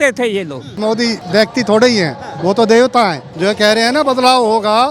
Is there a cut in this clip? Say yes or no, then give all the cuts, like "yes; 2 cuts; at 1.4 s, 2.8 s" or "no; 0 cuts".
yes; 2 cuts; at 1.2 s, 3.3 s